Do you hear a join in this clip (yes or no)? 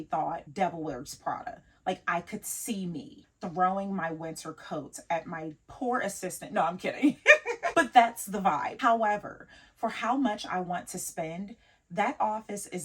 yes